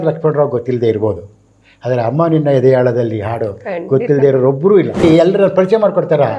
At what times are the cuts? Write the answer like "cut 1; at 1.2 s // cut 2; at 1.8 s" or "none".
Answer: cut 1; at 5.0 s